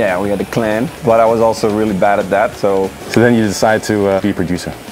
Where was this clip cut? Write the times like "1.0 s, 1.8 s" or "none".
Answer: 0.9 s, 3.0 s, 4.2 s